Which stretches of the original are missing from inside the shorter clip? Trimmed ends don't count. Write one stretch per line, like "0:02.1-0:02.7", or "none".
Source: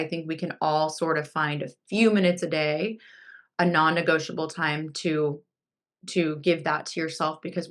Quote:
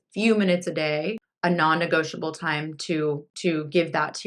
0:03.0-0:03.4
0:05.4-0:06.0